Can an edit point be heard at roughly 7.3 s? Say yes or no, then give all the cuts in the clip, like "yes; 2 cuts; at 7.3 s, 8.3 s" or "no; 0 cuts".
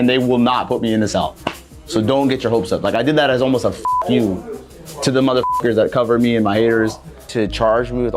yes; 1 cut; at 7.3 s